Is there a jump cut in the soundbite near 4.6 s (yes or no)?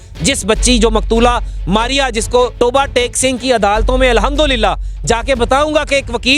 no